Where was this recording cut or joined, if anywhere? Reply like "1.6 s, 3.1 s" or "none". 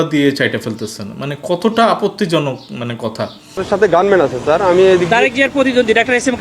3.6 s